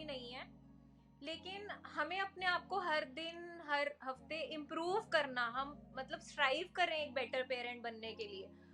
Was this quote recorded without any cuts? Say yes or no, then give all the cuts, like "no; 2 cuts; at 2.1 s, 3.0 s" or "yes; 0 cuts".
yes; 0 cuts